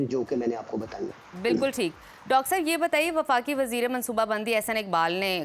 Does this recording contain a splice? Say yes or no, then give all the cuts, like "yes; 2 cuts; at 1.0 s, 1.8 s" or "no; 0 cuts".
no; 0 cuts